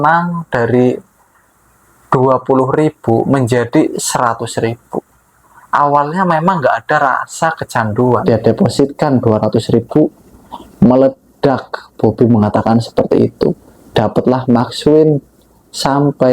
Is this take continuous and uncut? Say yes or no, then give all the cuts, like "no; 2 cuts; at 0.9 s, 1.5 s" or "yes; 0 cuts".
no; 1 cut; at 8.4 s